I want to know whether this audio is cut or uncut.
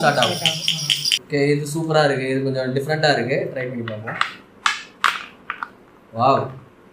cut